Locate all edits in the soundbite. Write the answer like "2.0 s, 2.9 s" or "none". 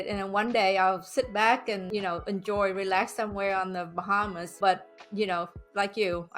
1.8 s, 4.4 s